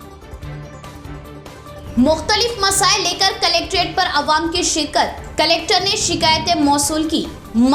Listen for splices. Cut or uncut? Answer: uncut